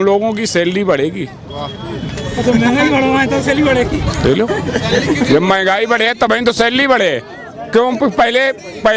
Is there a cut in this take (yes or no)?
no